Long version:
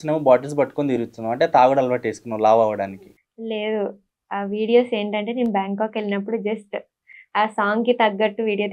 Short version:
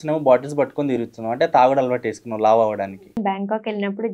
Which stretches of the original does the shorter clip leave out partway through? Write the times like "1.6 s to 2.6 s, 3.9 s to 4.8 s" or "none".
3.2 s to 5.5 s

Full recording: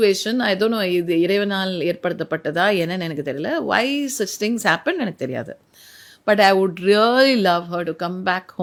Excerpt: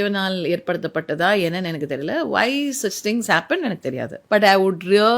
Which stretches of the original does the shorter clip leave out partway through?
5.5 s to 6.1 s

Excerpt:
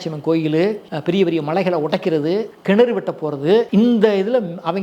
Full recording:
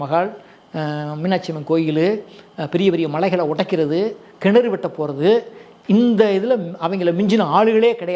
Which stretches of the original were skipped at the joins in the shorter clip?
2.3 s to 2.5 s, 4.2 s to 4.3 s, 5.4 s to 5.8 s

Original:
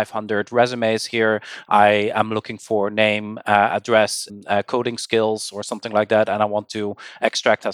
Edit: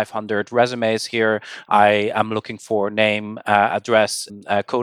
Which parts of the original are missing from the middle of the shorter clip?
none

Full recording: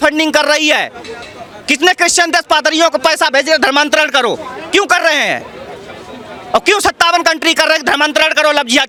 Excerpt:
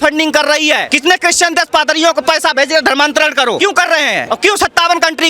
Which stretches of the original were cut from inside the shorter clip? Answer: 0.9 s to 1.7 s, 4.5 s to 6.0 s

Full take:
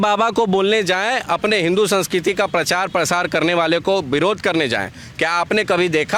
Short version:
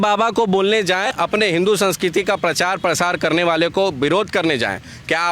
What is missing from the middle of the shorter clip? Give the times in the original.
1.1 s to 1.2 s

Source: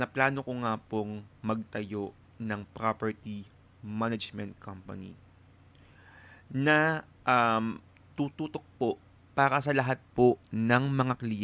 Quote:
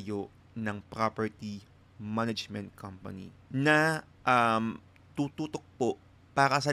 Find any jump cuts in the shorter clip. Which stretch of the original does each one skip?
5.2 s to 6.3 s

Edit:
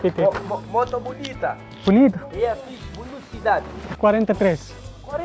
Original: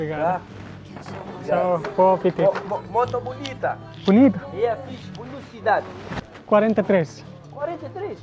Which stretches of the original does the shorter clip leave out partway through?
6.0 s to 6.3 s

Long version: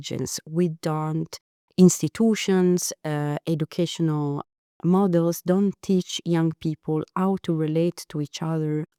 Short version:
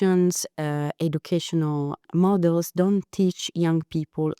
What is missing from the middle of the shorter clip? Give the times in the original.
4.5 s to 4.7 s

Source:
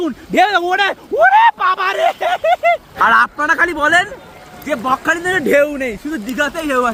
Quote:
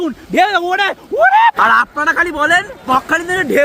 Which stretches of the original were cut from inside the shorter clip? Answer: 1.6 s to 3.0 s, 4.3 s to 4.8 s

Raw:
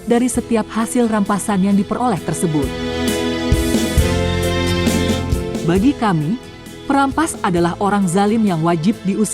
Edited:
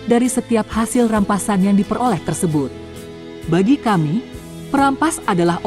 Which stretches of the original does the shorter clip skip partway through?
3.0 s to 5.2 s

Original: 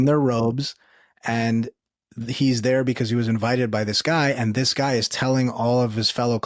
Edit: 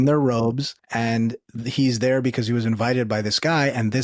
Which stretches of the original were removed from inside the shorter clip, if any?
1.1 s to 1.7 s

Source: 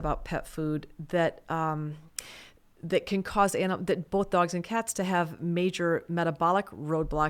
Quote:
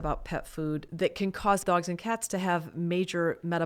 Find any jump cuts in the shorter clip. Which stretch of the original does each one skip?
0.9 s to 2.8 s, 3.5 s to 4.3 s

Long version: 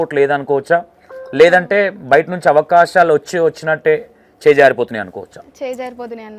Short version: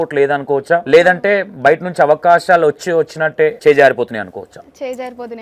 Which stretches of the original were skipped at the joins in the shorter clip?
0.8 s to 1.3 s, 4.0 s to 4.4 s

